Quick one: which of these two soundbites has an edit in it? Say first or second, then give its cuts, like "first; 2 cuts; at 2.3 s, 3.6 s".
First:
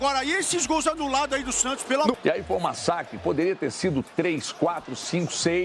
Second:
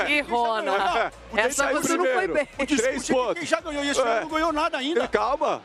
first; 1 cut; at 2.2 s